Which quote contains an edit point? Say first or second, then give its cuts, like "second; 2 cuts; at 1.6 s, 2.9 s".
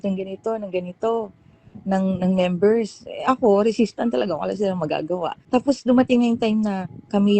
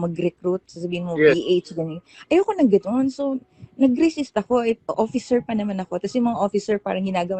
first; 1 cut; at 5.4 s